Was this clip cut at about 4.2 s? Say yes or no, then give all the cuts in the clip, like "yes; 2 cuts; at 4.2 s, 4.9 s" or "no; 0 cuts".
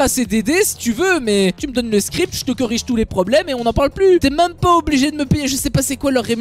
yes; 2 cuts; at 1.6 s, 4.2 s